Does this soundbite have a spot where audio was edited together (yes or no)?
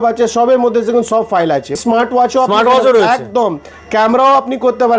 yes